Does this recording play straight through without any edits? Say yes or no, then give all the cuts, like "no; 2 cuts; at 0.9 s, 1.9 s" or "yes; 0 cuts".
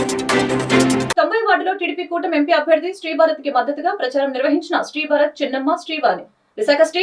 no; 1 cut; at 1.0 s